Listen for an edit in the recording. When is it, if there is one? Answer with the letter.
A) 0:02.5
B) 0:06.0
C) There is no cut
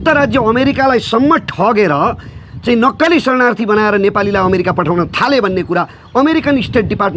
C